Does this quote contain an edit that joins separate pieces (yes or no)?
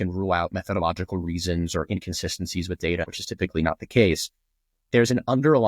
yes